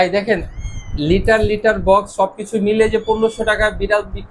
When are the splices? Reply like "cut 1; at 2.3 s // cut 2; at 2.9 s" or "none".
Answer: none